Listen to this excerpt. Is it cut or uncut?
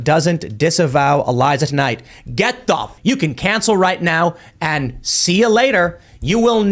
cut